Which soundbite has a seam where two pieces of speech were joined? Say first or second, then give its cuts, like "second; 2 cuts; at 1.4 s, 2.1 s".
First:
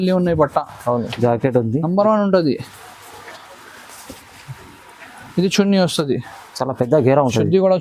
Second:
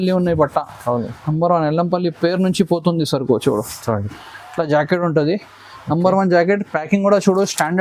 first; 1 cut; at 1.1 s